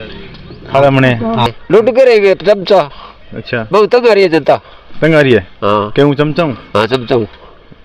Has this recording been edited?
yes; 1 cut; at 1.5 s

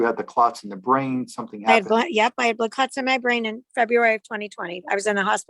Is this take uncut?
yes; 0 cuts

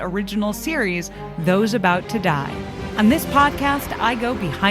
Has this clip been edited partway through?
yes; 1 cut; at 2.8 s

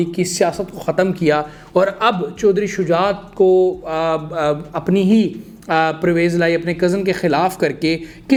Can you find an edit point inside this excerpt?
no; 0 cuts

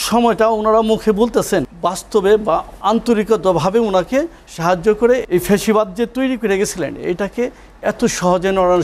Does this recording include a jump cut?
yes; 3 cuts; at 1.7 s, 2.7 s, 5.2 s

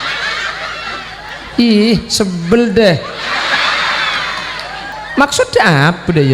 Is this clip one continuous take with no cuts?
no; 2 cuts; at 1.3 s, 4.9 s

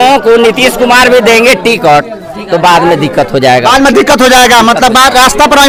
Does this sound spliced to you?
no; 0 cuts

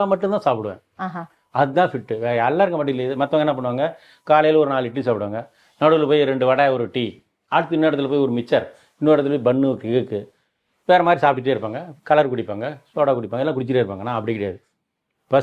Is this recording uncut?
yes; 0 cuts

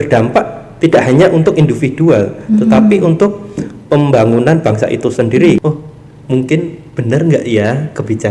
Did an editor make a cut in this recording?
yes; 1 cut; at 5.6 s

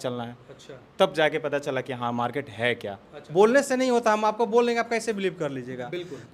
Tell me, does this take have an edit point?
yes; 1 cut; at 3.1 s

